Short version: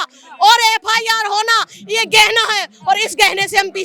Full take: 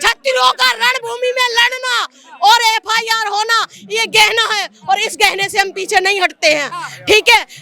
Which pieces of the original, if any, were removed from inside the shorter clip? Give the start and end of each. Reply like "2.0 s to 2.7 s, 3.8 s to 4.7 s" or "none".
none

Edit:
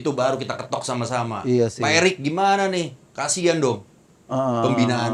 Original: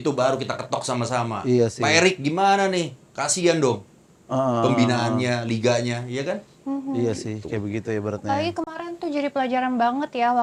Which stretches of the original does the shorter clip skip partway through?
none

